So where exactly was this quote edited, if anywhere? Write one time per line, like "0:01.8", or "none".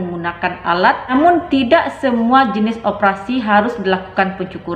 0:01.1

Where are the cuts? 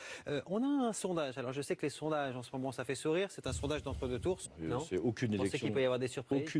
none

